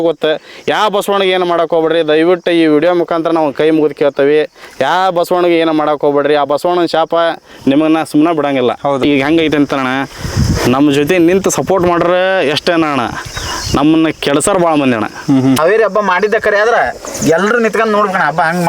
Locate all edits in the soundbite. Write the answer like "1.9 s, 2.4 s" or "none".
9.0 s, 15.6 s

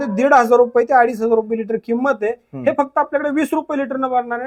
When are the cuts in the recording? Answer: none

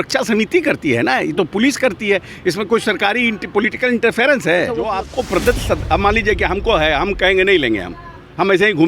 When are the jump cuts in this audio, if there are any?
5.0 s

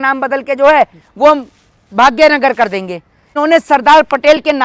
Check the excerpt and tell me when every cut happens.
3.3 s

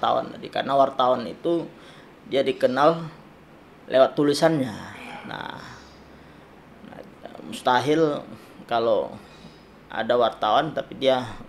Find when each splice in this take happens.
none

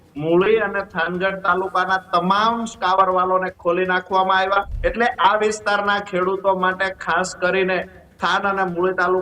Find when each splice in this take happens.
4.7 s

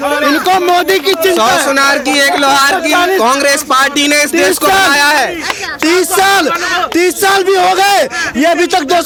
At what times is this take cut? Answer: none

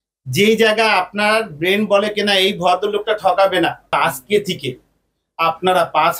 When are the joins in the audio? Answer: 3.9 s

